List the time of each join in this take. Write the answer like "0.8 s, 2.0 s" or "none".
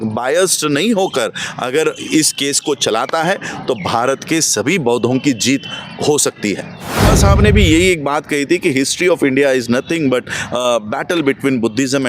7.1 s